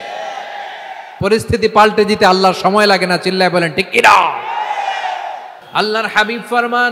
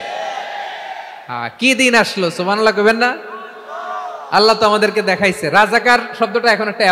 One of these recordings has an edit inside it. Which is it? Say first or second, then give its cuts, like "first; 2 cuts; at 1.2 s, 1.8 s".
first; 2 cuts; at 1.2 s, 5.5 s